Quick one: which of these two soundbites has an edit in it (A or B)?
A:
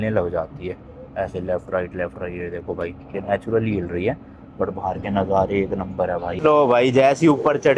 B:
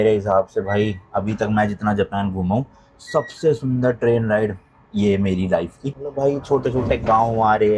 A